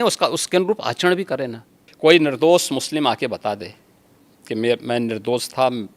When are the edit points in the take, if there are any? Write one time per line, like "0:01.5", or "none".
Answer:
0:01.8